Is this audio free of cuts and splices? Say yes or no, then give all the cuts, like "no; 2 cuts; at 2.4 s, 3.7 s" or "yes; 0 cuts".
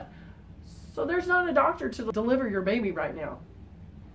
no; 1 cut; at 2.0 s